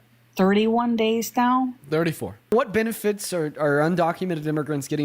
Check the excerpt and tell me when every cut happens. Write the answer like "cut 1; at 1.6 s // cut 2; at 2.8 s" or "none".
cut 1; at 2.5 s